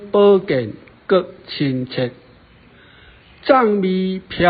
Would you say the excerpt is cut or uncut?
uncut